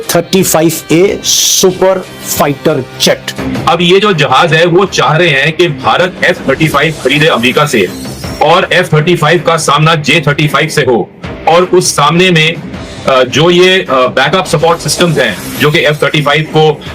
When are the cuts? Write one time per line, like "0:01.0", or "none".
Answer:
0:03.4